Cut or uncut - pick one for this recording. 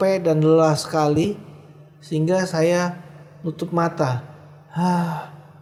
uncut